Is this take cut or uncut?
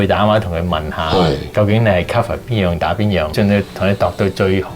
cut